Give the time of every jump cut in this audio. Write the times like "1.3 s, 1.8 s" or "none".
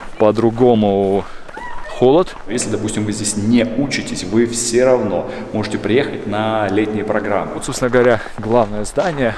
2.5 s, 7.7 s